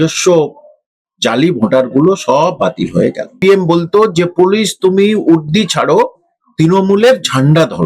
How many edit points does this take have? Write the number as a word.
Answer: one